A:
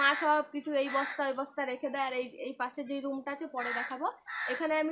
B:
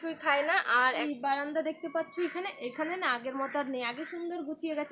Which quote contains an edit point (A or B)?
B